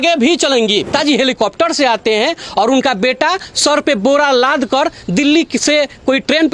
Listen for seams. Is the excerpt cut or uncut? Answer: cut